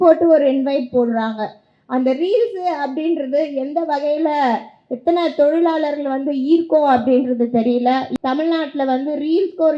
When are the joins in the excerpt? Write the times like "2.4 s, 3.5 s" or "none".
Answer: 8.1 s